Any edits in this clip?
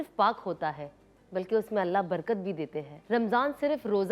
yes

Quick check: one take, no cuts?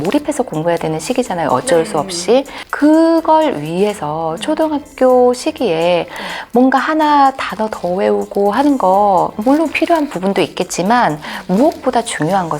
no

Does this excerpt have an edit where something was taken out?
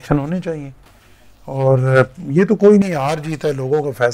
no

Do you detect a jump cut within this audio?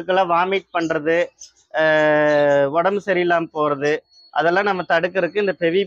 no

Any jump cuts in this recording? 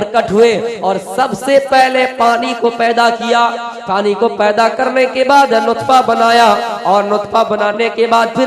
yes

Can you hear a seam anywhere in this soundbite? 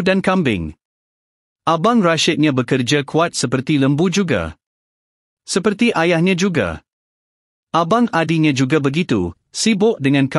yes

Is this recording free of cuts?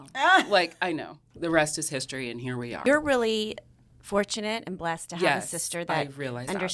no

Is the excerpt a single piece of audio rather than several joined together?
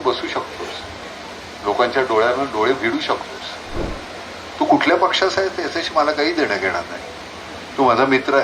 no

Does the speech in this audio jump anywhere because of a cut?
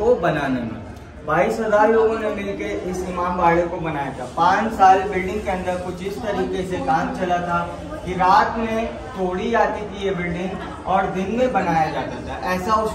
no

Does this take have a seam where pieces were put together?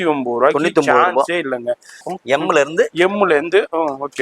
yes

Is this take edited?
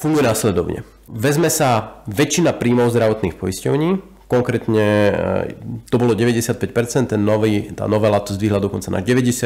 yes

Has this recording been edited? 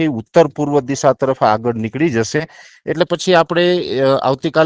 no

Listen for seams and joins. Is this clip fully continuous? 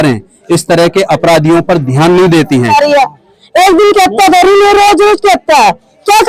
no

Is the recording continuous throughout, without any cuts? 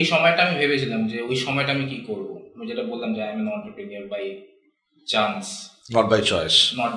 yes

